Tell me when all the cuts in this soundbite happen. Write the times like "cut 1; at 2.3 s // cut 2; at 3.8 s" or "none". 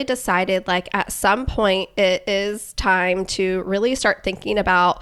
none